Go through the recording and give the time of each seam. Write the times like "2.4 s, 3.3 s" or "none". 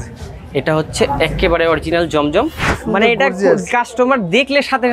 2.8 s